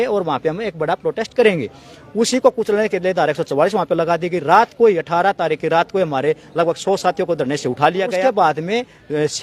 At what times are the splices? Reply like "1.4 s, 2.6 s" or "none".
8.2 s